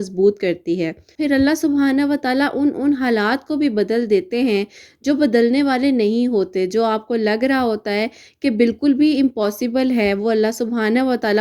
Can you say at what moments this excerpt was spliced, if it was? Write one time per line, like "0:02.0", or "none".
0:01.1